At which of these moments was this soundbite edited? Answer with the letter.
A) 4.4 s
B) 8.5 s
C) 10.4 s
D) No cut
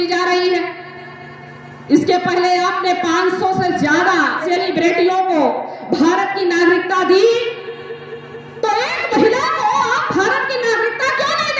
A